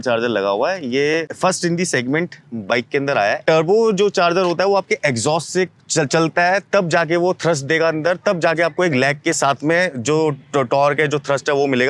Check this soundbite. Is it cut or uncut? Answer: cut